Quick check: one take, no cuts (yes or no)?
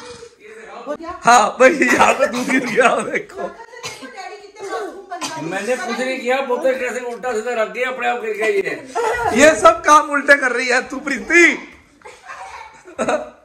yes